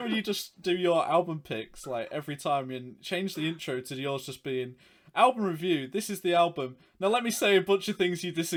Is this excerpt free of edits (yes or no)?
yes